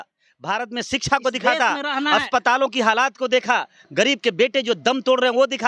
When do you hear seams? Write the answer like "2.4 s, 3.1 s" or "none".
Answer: none